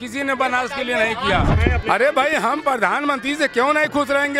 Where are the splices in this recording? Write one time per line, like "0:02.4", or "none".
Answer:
0:01.5